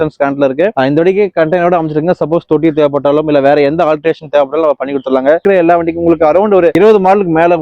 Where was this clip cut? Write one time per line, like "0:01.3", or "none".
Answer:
0:05.4